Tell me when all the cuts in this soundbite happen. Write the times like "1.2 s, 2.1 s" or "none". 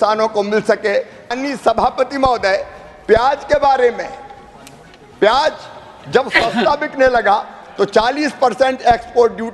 1.3 s